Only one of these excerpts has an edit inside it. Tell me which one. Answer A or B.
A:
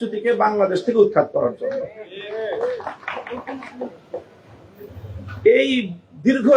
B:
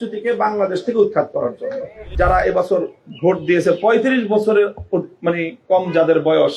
B